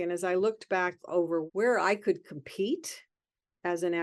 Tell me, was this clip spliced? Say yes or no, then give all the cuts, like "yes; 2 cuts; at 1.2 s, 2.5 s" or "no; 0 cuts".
yes; 1 cut; at 1.5 s